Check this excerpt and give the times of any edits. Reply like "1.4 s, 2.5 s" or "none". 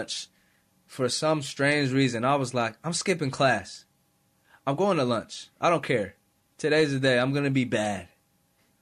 none